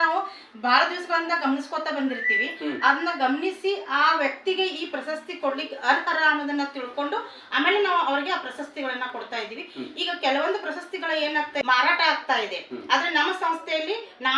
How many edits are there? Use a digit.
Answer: 1